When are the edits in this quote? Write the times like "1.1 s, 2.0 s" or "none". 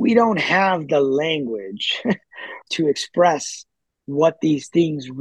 2.6 s